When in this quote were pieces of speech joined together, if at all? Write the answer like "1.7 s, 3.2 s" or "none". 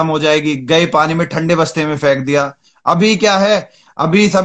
none